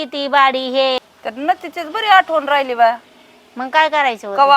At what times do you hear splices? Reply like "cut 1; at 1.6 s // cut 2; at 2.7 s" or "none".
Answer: cut 1; at 1.0 s